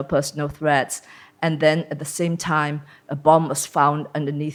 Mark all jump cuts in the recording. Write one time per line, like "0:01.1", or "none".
none